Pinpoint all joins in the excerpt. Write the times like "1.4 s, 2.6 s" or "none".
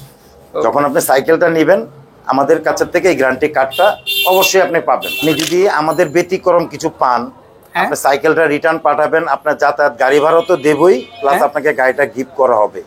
5.2 s